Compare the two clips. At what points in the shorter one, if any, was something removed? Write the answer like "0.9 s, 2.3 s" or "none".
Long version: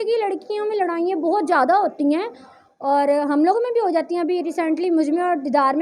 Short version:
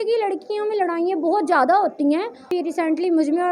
2.5 s